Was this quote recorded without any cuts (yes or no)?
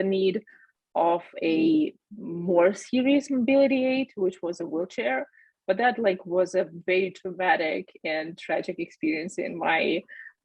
yes